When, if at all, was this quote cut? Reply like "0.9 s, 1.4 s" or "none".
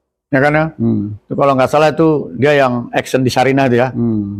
none